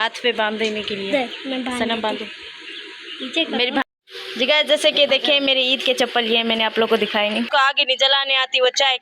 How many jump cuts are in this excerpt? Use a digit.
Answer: 2